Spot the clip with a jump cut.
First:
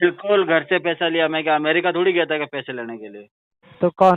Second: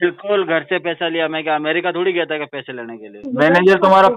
second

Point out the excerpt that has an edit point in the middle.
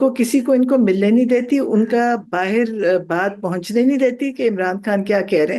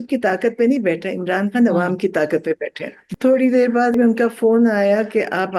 second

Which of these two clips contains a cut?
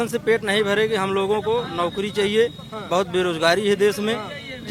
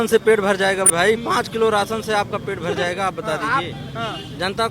second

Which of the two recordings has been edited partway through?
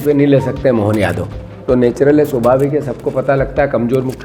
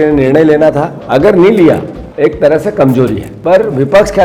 second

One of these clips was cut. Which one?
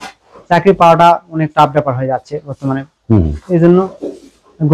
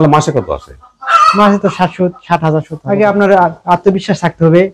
second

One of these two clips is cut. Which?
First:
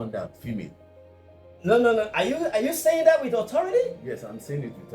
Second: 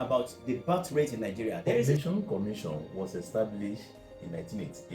second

